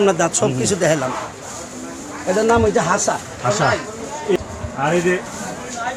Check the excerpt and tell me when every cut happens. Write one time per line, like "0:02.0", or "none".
0:04.4